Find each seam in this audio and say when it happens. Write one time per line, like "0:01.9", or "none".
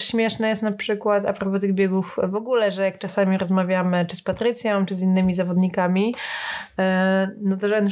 none

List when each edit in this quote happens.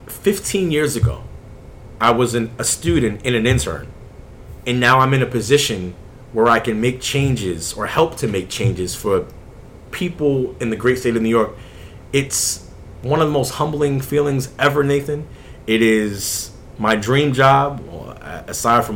none

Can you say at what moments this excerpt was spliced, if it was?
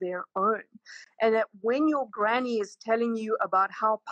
none

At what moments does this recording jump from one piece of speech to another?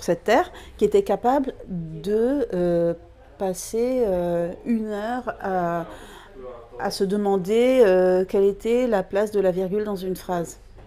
none

